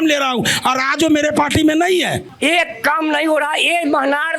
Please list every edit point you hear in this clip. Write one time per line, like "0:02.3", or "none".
0:02.2